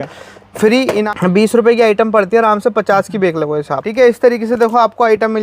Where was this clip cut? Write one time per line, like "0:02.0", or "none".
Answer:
0:01.1
0:03.8